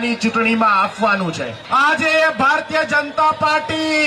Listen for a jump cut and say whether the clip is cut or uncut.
cut